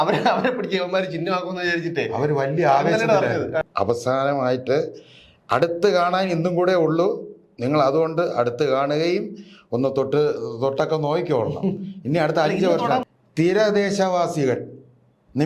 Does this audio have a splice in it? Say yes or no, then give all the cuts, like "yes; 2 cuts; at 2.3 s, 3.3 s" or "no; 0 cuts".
yes; 2 cuts; at 3.6 s, 13.1 s